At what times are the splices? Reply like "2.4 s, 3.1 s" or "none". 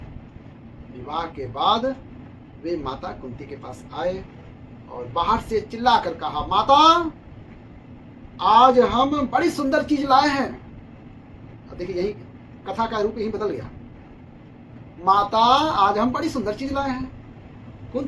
none